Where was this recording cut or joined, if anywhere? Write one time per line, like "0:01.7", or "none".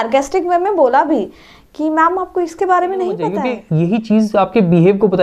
0:03.5